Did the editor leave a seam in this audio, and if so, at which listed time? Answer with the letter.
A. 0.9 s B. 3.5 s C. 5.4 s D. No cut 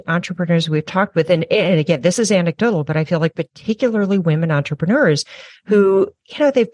D